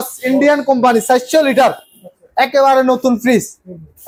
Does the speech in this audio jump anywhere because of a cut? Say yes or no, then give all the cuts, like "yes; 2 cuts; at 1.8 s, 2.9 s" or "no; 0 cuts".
no; 0 cuts